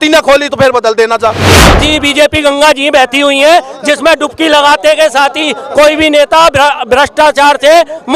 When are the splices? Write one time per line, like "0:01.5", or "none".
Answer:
0:01.7